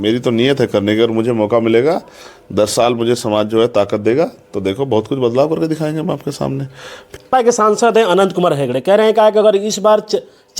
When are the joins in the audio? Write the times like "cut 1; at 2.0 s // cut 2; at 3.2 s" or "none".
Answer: cut 1; at 7.1 s